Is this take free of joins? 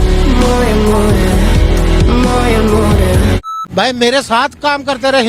no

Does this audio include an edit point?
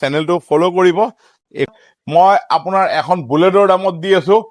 yes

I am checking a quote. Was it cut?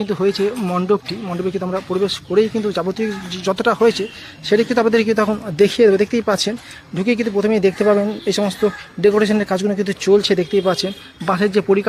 no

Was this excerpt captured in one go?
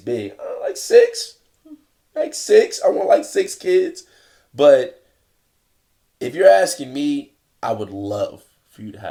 yes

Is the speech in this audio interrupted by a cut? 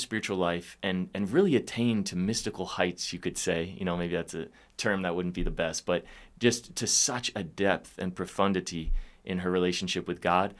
no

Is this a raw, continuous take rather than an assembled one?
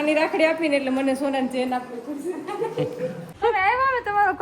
no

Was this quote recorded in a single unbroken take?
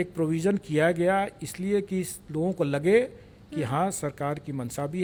yes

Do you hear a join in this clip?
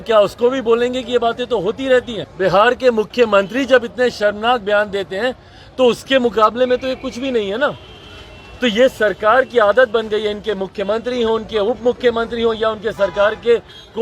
yes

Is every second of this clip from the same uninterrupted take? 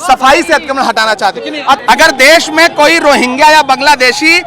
no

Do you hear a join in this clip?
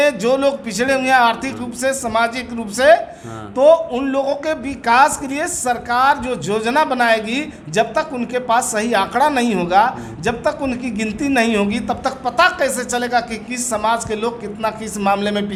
no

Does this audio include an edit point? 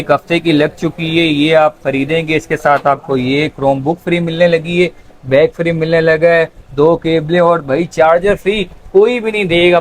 no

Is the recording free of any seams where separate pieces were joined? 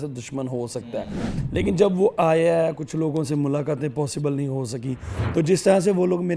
yes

